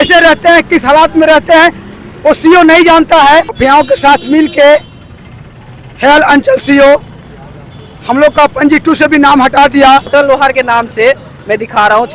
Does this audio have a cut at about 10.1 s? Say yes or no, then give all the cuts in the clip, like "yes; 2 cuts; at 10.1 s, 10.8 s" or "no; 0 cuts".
yes; 2 cuts; at 3.5 s, 10.1 s